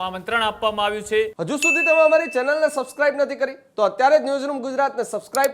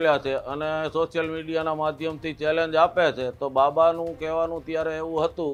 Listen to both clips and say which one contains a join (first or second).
first